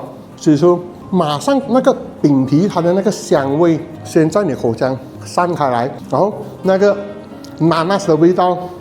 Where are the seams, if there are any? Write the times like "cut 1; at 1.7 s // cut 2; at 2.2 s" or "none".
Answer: cut 1; at 6.0 s